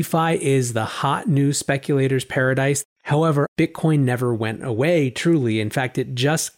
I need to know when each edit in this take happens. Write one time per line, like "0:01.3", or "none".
0:03.1